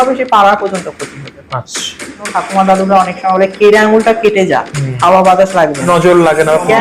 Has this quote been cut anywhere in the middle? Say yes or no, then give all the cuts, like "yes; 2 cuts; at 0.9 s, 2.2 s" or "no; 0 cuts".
yes; 1 cut; at 2.0 s